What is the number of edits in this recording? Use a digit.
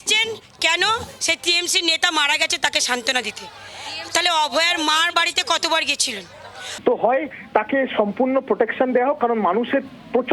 1